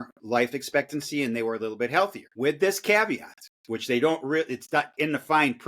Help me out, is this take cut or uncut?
cut